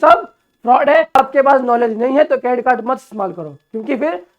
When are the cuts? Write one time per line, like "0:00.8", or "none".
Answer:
0:01.2